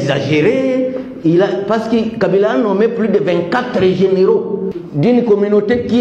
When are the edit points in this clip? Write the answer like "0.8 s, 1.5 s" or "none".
4.8 s